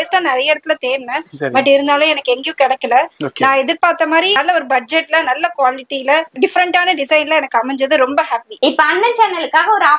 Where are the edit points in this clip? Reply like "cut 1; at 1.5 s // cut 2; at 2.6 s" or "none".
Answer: cut 1; at 4.4 s // cut 2; at 6.3 s // cut 3; at 8.5 s

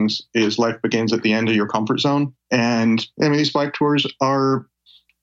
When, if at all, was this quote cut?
cut 1; at 2.4 s // cut 2; at 3.1 s

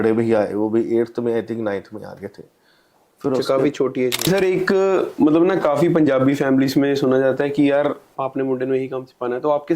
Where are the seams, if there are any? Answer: cut 1; at 4.3 s // cut 2; at 8.1 s

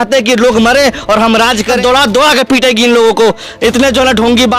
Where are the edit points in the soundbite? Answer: cut 1; at 1.8 s

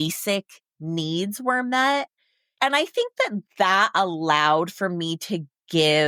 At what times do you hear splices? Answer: none

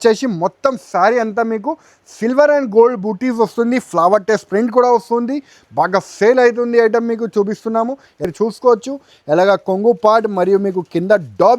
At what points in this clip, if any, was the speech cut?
cut 1; at 8.2 s

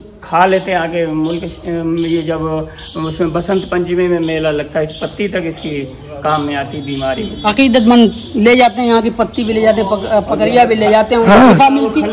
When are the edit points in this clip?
none

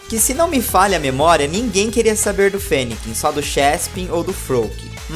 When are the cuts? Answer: cut 1; at 2.8 s

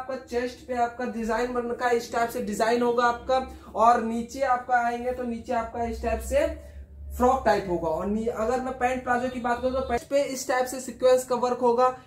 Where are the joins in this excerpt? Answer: cut 1; at 10.0 s

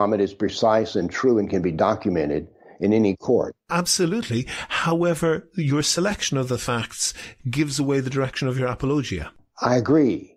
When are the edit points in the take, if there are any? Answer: none

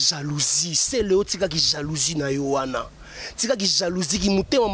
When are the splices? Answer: none

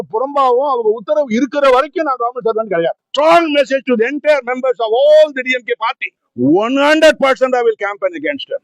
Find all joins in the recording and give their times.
cut 1; at 3.0 s

